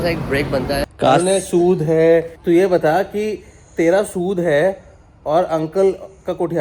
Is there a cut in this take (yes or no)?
yes